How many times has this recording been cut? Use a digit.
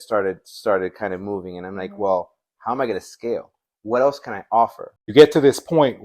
1